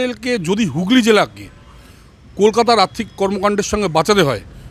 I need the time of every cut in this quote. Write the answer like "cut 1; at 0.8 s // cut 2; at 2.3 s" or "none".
none